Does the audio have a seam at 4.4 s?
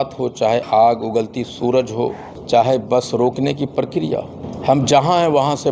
yes; 2 cuts; at 2.3 s, 4.4 s

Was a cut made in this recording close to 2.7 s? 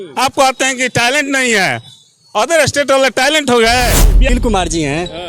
no; 1 cut; at 4.3 s

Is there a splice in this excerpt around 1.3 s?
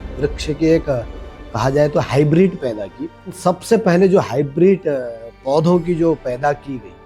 no; 1 cut; at 3.4 s

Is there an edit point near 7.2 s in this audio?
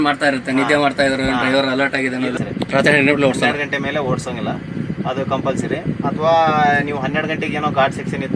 no; 1 cut; at 2.4 s

